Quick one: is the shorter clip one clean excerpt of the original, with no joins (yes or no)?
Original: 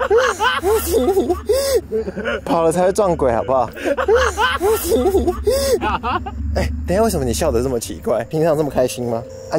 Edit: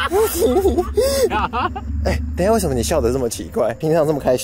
no